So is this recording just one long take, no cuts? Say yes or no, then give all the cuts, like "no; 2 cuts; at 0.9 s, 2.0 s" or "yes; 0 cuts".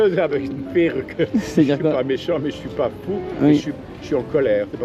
yes; 0 cuts